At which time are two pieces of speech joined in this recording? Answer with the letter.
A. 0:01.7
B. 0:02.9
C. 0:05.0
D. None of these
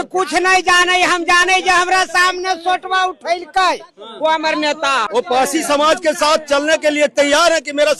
C